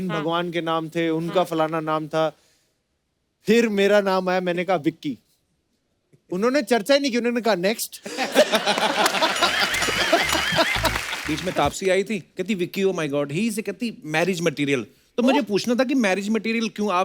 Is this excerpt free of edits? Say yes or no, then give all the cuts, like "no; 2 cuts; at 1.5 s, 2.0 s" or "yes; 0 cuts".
no; 1 cut; at 11.1 s